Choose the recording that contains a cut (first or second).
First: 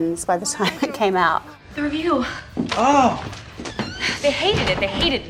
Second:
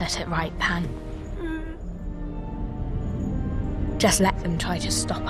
first